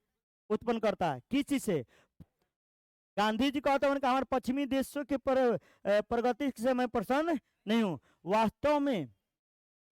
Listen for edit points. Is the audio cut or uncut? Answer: cut